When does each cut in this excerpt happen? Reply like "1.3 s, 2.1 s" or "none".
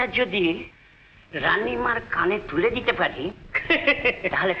none